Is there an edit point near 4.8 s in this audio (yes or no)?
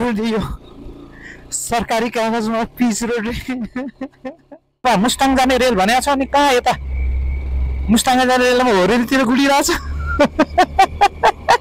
yes